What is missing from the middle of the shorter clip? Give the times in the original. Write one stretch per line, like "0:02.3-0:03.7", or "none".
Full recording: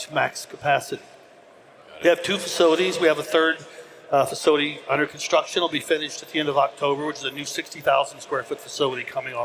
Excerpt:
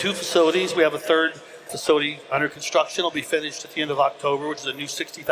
0:04.0-0:04.3